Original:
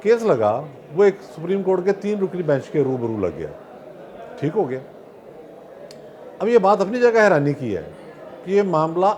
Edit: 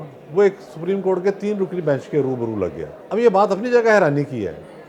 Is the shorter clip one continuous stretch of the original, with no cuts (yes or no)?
no